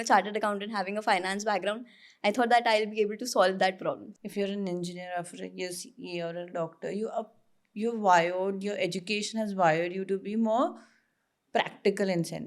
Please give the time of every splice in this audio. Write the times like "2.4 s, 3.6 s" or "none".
4.1 s